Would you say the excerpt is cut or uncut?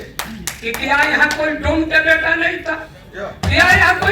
uncut